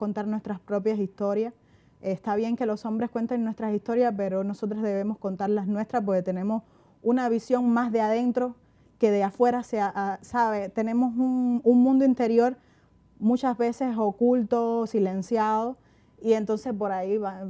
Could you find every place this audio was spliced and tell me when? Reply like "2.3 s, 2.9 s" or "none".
none

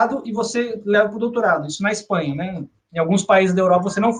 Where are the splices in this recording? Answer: none

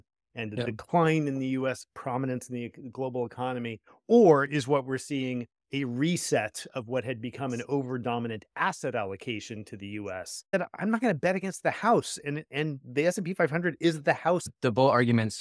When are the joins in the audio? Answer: 10.5 s, 14.5 s

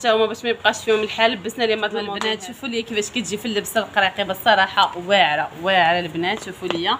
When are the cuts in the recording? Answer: 2.1 s

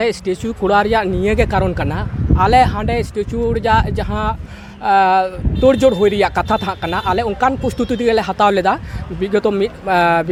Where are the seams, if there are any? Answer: none

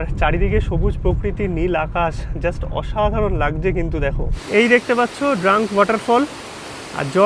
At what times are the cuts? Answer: 4.4 s

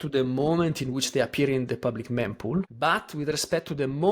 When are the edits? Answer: 2.7 s

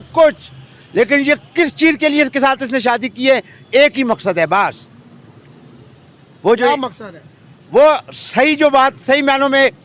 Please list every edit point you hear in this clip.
none

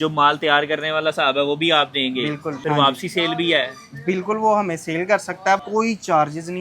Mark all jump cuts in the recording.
2.5 s, 5.6 s

